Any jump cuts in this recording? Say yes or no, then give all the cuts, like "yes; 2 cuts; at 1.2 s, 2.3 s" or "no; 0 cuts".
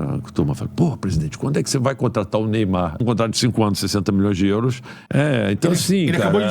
yes; 2 cuts; at 3.0 s, 4.9 s